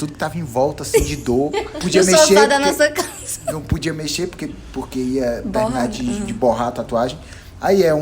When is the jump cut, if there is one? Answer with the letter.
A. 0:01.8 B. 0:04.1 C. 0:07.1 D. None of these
A